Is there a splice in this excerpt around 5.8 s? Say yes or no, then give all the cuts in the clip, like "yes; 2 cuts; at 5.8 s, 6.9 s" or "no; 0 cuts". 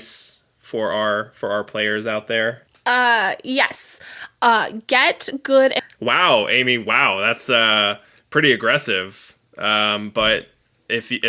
yes; 2 cuts; at 2.7 s, 5.8 s